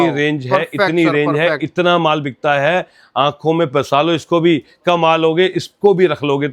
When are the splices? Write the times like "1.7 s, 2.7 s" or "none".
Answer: none